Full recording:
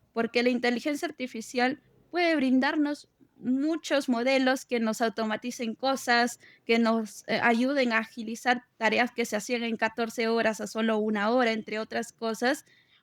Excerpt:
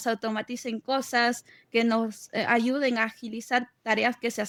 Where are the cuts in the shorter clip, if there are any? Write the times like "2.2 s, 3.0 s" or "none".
none